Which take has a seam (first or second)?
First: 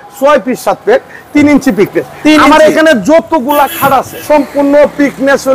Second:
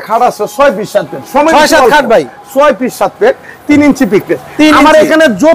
first